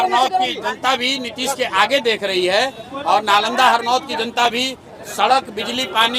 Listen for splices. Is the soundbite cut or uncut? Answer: uncut